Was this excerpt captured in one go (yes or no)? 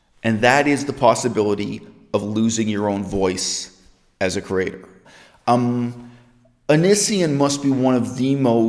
no